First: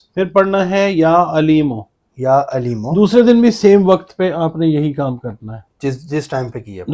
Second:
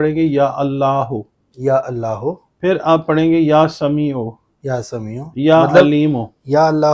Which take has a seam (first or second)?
first